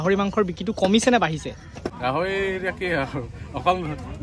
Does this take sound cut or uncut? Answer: cut